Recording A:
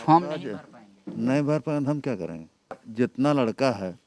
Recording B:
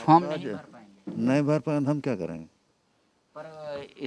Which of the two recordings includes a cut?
A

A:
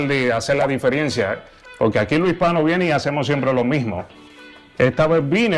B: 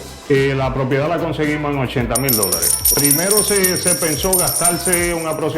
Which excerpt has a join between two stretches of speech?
B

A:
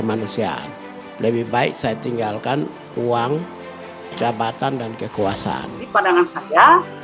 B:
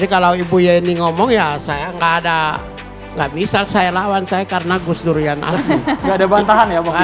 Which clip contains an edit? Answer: A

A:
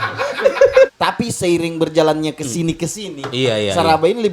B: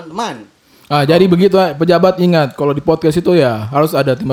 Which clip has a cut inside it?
A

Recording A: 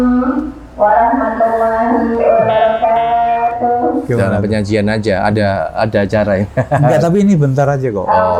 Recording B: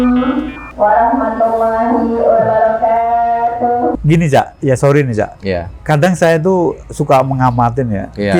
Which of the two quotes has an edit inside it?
B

